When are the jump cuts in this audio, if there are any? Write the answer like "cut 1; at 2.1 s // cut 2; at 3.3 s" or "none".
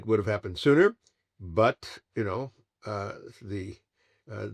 none